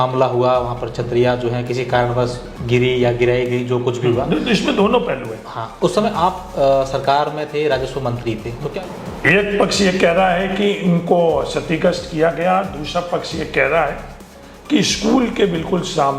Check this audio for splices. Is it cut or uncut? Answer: cut